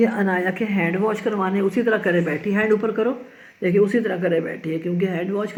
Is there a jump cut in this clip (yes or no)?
no